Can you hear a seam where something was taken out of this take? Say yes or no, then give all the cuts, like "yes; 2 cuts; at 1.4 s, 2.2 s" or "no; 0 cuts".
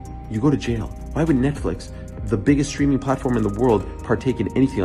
no; 0 cuts